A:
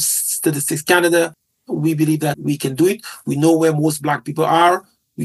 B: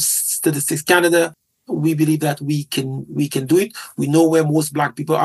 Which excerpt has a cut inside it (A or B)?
A